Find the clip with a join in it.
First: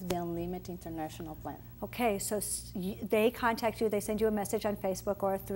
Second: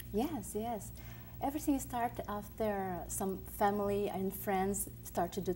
second; 1 cut; at 3.1 s

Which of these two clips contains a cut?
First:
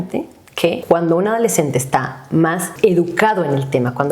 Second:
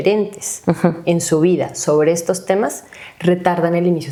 first; 2 cuts; at 0.8 s, 2.7 s

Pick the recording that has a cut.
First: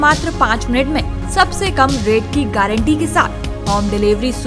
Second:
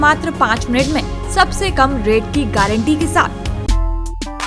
second; 1 cut; at 3.4 s

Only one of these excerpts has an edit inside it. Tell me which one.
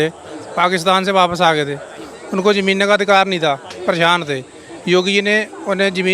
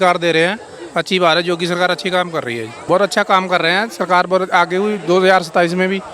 second; 1 cut; at 2.7 s

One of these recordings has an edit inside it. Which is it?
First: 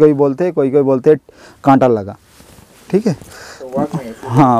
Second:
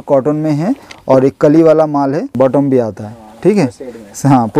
second; 1 cut; at 2.3 s

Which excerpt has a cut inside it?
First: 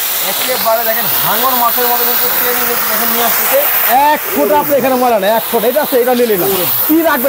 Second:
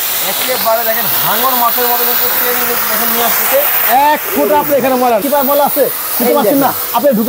second; 1 cut; at 5.2 s

